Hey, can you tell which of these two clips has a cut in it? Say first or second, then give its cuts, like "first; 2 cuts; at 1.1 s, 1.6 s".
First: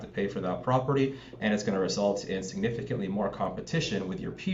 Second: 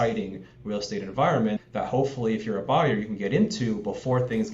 second; 1 cut; at 1.6 s